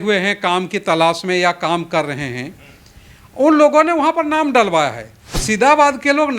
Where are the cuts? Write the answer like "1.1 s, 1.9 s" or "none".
5.4 s